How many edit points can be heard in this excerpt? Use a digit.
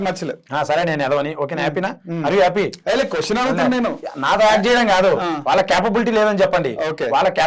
0